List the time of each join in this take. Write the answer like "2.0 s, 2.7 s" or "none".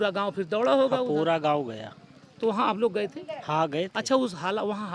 none